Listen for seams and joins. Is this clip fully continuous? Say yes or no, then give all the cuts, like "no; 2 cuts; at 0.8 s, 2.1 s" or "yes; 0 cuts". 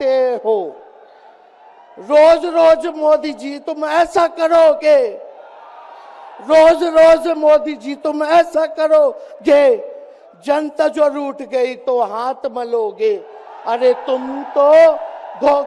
yes; 0 cuts